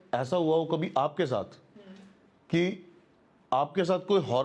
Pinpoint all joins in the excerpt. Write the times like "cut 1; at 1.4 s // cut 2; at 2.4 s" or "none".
none